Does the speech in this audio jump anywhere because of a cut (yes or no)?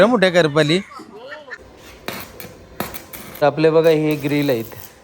yes